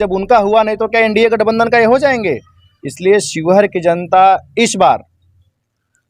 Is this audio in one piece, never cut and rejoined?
yes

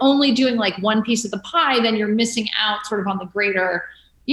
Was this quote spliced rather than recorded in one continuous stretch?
no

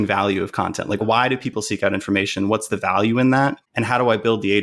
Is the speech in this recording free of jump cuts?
no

